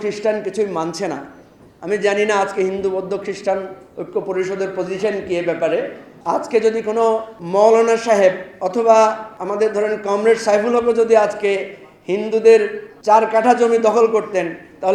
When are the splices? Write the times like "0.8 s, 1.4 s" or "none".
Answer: 6.1 s, 7.3 s, 8.5 s, 9.3 s, 12.9 s